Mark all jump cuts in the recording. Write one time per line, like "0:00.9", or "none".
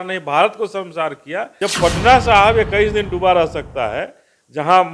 0:01.4